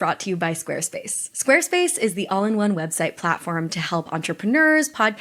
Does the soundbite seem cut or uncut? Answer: uncut